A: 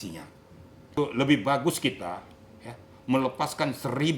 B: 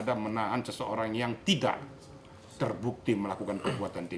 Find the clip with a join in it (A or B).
A